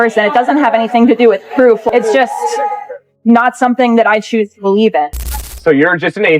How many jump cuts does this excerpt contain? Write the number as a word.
two